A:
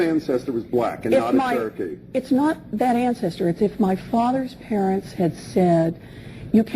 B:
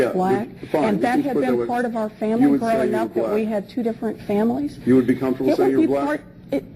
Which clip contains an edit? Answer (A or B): A